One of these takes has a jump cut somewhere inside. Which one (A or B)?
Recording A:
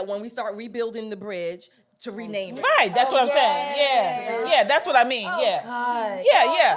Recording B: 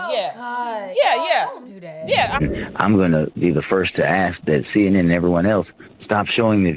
B